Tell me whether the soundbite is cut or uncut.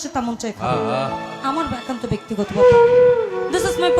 uncut